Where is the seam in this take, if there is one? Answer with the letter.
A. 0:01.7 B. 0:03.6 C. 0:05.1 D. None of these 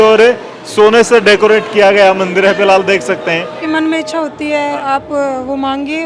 B